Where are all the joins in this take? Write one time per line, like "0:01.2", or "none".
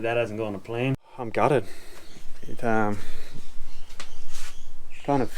0:01.2